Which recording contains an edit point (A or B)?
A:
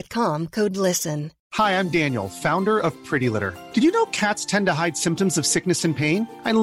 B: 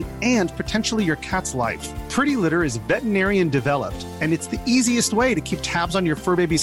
A